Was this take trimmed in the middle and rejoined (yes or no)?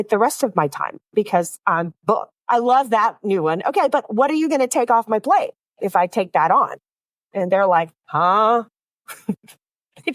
yes